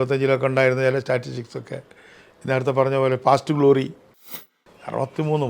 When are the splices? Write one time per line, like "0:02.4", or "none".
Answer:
0:04.3